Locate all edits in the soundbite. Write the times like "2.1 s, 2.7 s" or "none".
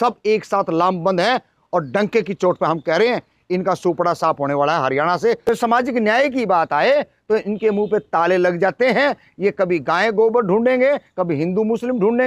5.4 s